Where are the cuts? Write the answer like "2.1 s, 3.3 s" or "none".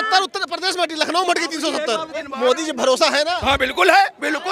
2.1 s